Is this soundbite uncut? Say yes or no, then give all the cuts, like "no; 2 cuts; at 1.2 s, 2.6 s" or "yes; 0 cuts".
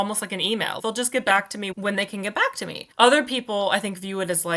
no; 3 cuts; at 0.8 s, 1.7 s, 2.8 s